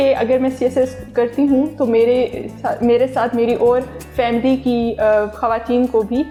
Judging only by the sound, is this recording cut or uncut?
uncut